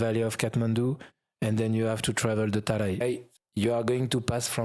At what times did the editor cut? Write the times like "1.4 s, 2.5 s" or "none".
3.0 s